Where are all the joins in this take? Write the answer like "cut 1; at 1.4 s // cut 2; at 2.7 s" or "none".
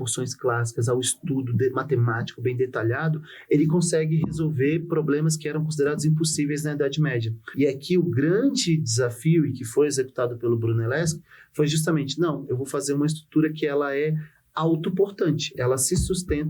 cut 1; at 7.4 s // cut 2; at 15.5 s